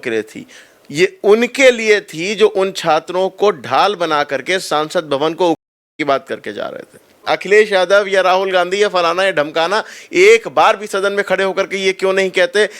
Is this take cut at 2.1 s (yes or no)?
no